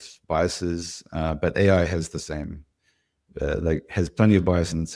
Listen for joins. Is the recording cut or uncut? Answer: uncut